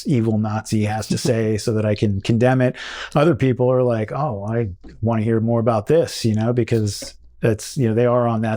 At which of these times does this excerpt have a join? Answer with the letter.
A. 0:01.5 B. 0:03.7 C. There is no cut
C